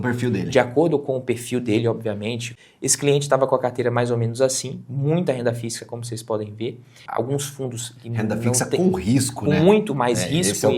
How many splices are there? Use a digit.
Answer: 2